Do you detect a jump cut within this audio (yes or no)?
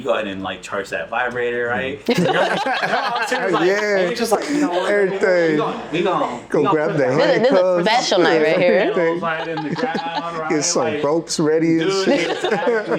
no